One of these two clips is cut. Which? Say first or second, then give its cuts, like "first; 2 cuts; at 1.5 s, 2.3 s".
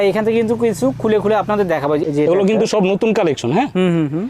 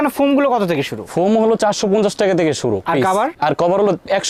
first; 1 cut; at 2.0 s